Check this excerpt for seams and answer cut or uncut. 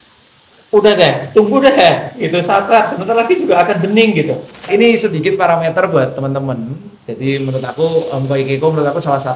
cut